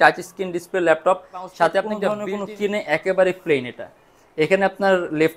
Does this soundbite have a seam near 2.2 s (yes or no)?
yes